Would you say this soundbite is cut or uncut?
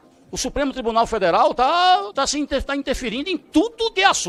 uncut